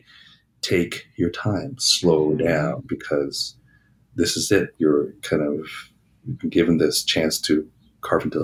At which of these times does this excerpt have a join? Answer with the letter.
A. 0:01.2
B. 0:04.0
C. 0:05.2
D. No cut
D